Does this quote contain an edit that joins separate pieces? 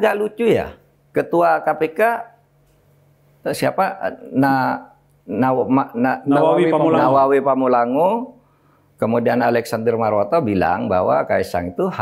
no; 0 cuts

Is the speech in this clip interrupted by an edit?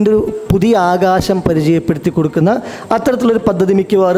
no; 0 cuts

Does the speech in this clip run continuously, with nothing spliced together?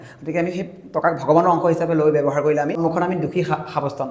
no; 1 cut; at 2.8 s

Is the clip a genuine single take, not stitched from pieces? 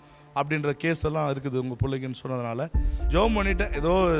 no; 1 cut; at 2.9 s

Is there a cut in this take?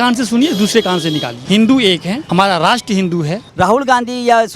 yes; 3 cuts; at 1.3 s, 2.2 s, 3.5 s

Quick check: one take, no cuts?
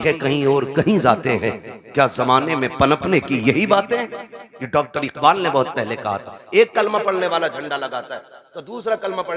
yes; 0 cuts

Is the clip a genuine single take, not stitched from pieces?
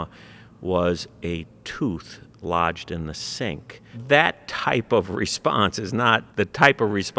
no; 2 cuts; at 3.9 s, 6.3 s

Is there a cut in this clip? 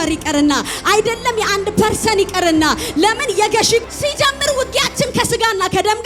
yes; 1 cut; at 3.9 s

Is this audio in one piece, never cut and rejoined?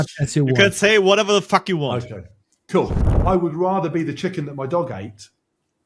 no; 1 cut; at 3.1 s

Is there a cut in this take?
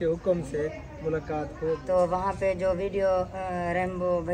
yes; 1 cut; at 1.8 s

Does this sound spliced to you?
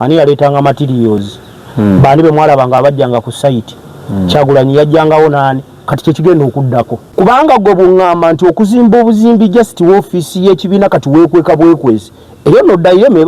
yes; 1 cut; at 7.0 s

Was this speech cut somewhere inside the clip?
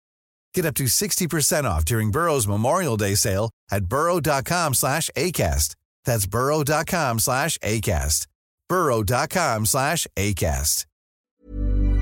yes; 1 cut; at 11.1 s

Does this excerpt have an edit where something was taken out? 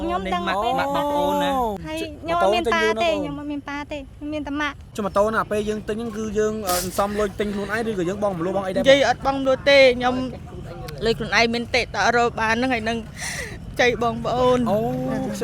yes; 2 cuts; at 1.8 s, 4.9 s

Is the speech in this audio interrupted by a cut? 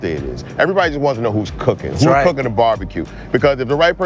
no; 0 cuts

